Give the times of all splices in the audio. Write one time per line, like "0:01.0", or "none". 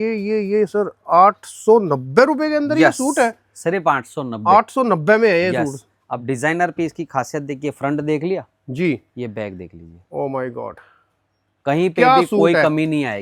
none